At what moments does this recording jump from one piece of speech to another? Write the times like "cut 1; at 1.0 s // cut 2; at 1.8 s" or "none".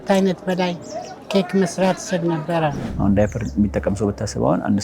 cut 1; at 2.9 s